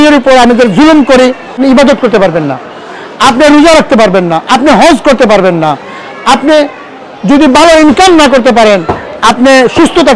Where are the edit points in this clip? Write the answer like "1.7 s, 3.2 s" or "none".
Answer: 1.6 s